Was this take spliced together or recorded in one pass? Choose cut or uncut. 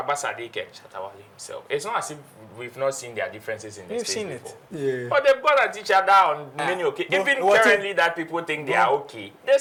uncut